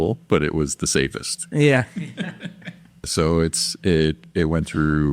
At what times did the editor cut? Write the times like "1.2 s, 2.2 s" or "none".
3.1 s